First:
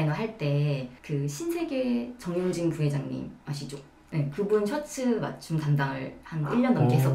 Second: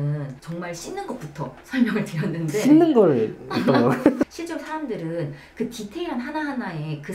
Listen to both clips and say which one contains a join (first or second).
second